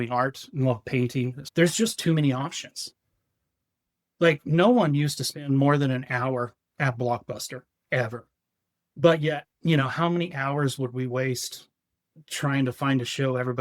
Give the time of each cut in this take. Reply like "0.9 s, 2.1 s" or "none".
1.4 s